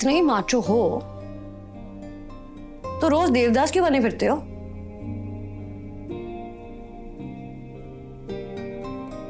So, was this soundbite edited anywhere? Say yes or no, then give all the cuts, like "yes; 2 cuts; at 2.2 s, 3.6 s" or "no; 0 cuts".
no; 0 cuts